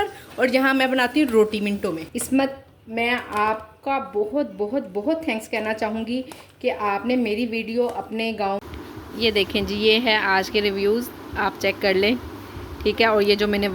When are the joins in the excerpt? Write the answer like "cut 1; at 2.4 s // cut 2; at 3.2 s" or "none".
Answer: cut 1; at 2.1 s // cut 2; at 8.6 s